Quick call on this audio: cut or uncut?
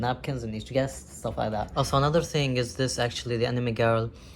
cut